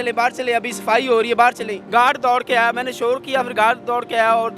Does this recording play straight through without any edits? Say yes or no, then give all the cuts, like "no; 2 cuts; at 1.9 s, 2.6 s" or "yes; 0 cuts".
no; 1 cut; at 1.7 s